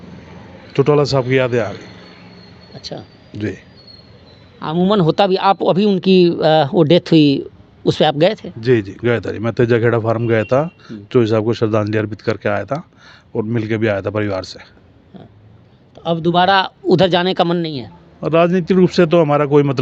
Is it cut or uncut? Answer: uncut